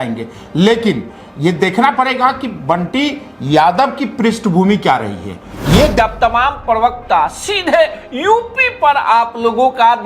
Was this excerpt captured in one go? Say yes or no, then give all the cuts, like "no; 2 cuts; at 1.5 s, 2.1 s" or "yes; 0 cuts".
no; 1 cut; at 6.0 s